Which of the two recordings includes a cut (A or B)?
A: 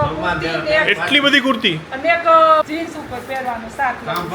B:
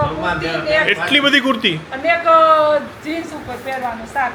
A